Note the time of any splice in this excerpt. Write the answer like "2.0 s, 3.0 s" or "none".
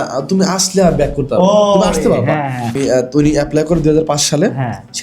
2.7 s